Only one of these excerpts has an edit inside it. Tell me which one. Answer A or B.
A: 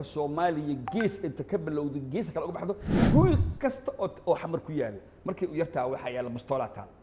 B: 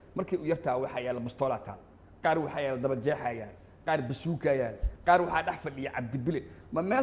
A